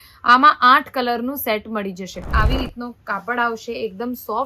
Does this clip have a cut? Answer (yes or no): yes